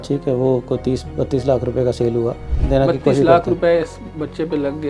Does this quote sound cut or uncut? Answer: cut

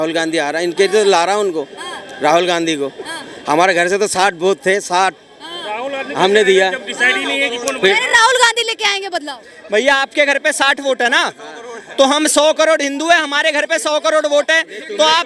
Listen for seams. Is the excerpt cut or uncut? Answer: uncut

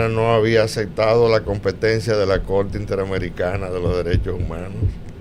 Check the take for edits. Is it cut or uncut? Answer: uncut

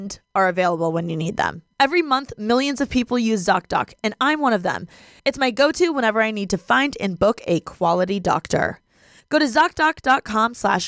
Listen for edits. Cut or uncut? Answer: uncut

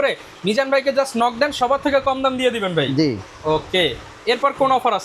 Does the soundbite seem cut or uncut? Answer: uncut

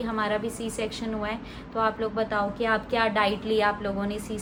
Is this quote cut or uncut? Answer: uncut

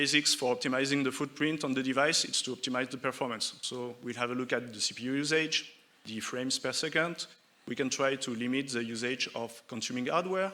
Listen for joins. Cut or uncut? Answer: uncut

